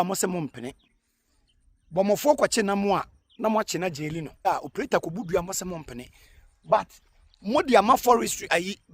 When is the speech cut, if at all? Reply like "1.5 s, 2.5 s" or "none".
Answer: 4.5 s

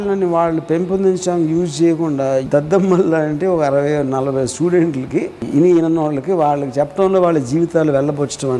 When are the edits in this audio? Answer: 2.5 s, 5.4 s

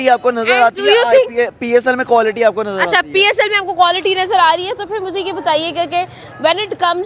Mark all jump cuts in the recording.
none

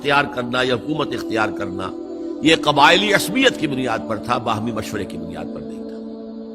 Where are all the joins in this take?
5.2 s

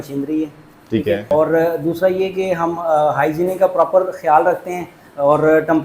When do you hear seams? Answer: 1.3 s

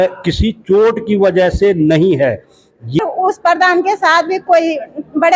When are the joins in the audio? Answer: 3.0 s

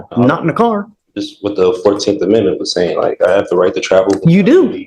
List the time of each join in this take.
none

